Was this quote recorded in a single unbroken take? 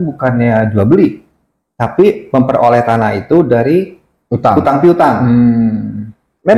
yes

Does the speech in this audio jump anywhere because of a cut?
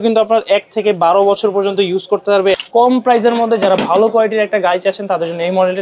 yes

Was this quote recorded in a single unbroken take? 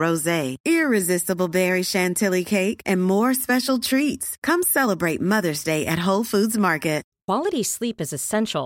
no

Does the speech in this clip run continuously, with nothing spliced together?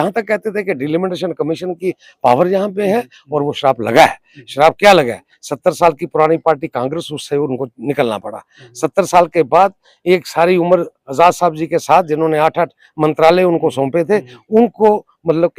yes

